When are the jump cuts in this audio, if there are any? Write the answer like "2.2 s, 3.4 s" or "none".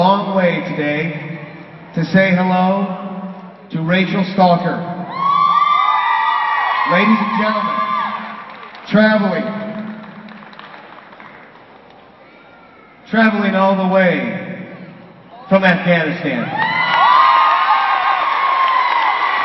none